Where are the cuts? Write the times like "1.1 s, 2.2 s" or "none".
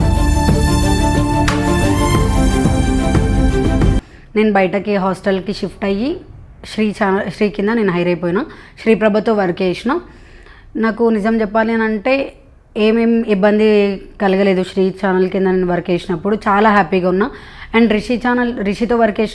none